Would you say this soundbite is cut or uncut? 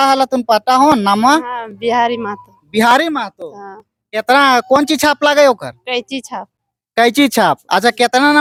uncut